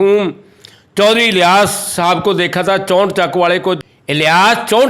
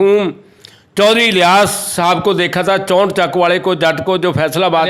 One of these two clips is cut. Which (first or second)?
first